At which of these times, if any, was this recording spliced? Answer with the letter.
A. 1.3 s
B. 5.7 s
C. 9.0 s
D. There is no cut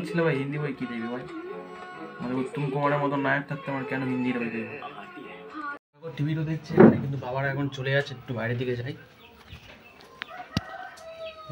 D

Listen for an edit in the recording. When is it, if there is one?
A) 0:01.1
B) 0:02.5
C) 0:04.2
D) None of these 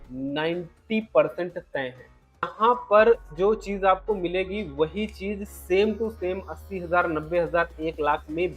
B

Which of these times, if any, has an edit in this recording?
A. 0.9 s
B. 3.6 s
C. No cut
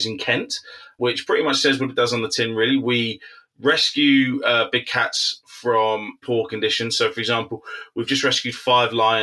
A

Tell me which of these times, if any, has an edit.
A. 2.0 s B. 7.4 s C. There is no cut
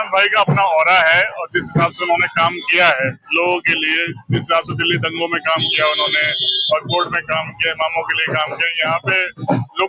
C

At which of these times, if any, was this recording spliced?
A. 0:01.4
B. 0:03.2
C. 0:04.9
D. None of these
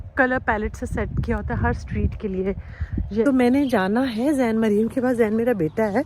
B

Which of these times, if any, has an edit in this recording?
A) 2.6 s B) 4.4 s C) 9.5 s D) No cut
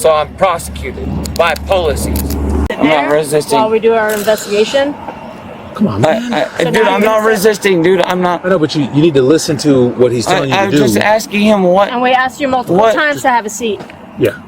A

